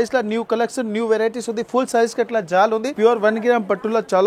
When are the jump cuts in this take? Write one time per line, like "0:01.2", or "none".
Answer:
0:02.9